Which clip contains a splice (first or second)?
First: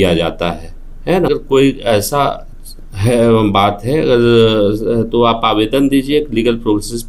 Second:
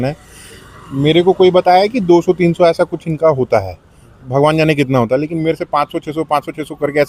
first